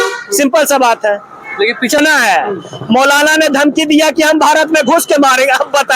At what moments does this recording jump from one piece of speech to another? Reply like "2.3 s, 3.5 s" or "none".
2.0 s